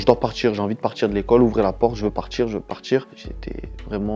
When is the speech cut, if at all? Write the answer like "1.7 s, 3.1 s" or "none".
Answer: 3.2 s